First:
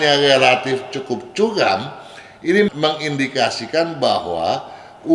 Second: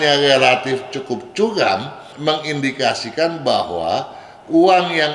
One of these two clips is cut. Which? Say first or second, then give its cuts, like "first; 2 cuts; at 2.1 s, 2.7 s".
second; 1 cut; at 2.2 s